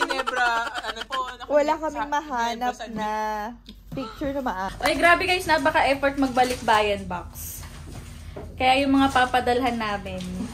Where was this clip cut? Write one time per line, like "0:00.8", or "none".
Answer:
0:04.7